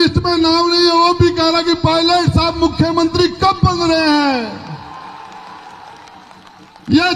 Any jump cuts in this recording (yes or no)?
no